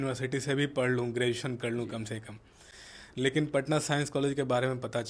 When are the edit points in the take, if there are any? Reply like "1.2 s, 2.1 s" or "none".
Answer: none